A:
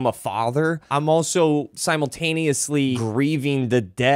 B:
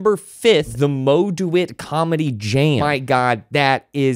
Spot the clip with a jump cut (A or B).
A